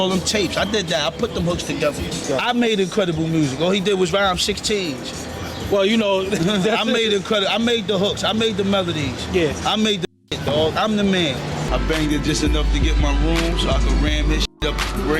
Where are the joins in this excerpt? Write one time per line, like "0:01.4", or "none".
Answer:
0:11.6